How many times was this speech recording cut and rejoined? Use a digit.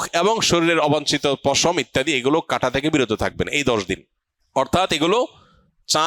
0